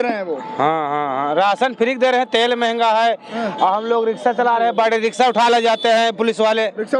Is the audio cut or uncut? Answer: uncut